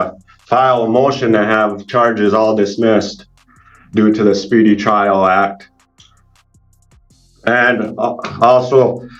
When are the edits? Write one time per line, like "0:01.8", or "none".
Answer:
none